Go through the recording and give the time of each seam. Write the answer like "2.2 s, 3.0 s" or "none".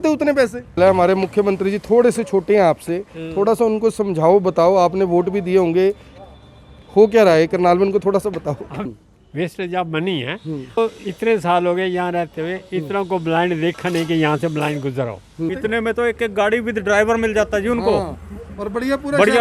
0.8 s, 8.7 s, 10.8 s, 15.6 s